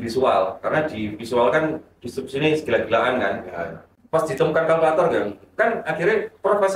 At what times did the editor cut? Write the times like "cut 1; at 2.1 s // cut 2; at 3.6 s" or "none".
cut 1; at 3.9 s